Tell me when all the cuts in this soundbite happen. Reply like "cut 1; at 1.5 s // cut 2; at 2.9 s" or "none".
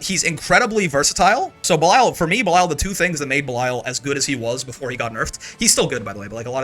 cut 1; at 1.6 s